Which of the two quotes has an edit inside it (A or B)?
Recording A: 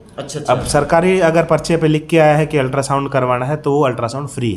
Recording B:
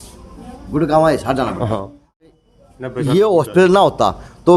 B